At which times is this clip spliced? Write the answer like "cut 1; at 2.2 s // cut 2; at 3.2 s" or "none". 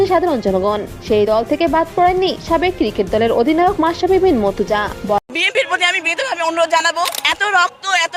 cut 1; at 5.2 s